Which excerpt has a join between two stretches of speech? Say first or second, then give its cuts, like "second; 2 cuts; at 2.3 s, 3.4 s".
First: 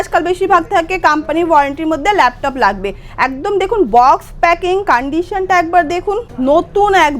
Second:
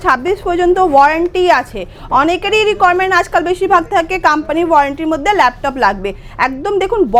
first; 1 cut; at 6.3 s